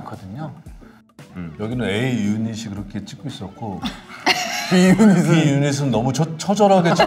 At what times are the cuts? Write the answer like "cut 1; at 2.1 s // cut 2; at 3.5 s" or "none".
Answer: cut 1; at 1.2 s